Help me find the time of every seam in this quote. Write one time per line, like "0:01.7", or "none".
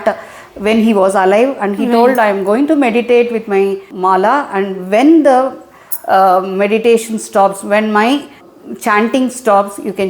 0:03.9
0:08.4